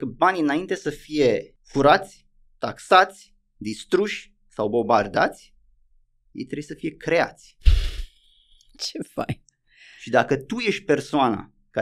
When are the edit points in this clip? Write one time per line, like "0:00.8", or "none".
0:01.6

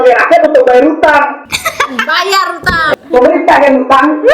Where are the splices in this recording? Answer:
0:02.9

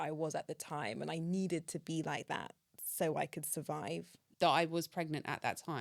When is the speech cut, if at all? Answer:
0:04.1

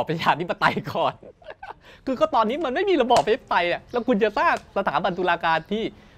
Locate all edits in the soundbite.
none

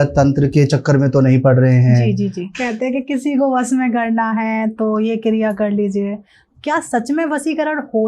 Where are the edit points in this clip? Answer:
0:02.4
0:06.4

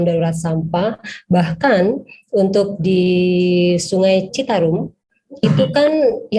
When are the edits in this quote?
none

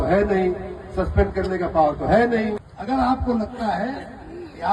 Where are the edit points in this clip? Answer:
0:02.7

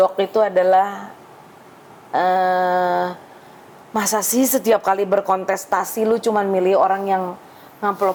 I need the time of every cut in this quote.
none

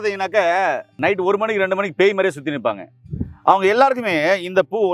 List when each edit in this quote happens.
0:01.0

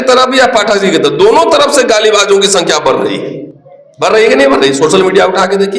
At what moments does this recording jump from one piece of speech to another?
none

